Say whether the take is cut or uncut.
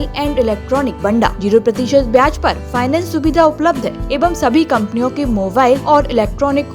cut